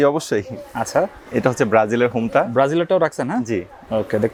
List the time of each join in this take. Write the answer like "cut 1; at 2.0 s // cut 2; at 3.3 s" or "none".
none